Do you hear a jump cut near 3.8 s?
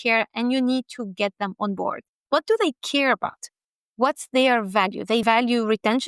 no; 2 cuts; at 2.2 s, 5.2 s

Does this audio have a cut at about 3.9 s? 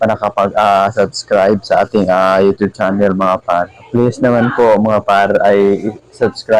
yes; 1 cut; at 3.9 s

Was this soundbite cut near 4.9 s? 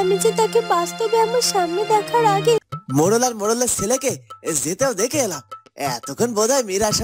no; 1 cut; at 2.7 s

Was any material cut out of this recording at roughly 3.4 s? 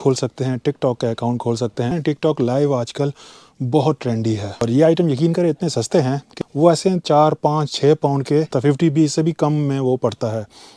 no; 4 cuts; at 1.9 s, 4.7 s, 6.3 s, 8.5 s

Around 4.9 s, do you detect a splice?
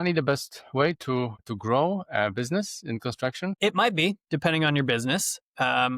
no; 2 cuts; at 1.4 s, 3.6 s

